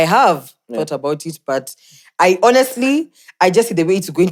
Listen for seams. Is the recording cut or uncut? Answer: uncut